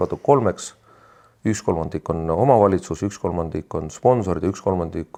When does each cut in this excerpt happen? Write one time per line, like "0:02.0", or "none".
none